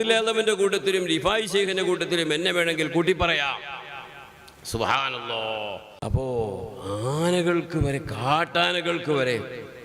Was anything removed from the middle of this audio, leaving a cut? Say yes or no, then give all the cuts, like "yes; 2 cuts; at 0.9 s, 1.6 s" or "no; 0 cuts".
yes; 1 cut; at 5.9 s